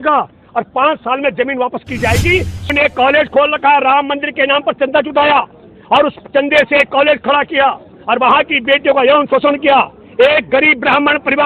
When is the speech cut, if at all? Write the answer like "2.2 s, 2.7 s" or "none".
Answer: 2.7 s

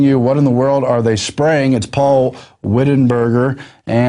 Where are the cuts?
none

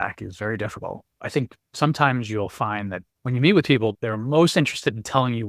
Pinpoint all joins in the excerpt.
1.3 s, 3.0 s, 3.9 s

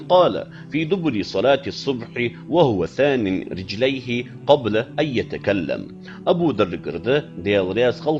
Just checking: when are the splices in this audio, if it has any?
6.3 s

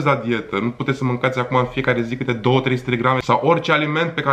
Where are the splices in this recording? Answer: 3.2 s

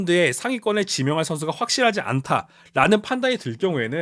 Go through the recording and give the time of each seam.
none

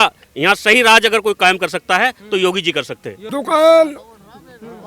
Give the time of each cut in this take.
3.2 s

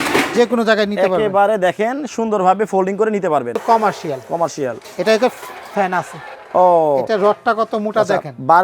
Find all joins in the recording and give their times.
3.6 s

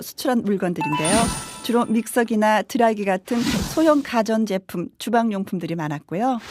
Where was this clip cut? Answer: 5.4 s

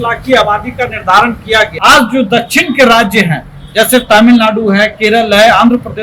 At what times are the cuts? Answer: 1.7 s

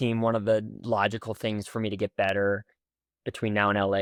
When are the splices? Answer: none

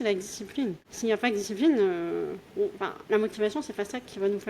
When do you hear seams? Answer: 0.9 s, 2.9 s

